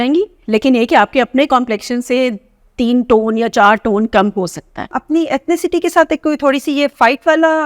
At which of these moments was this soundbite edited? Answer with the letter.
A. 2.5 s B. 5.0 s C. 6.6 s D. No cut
B